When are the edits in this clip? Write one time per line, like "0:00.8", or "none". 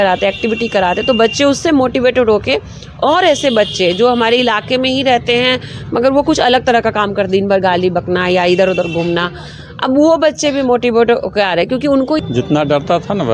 0:12.2